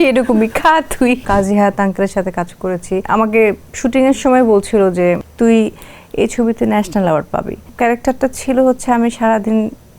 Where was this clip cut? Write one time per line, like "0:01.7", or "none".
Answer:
0:01.2
0:03.0
0:05.3
0:07.6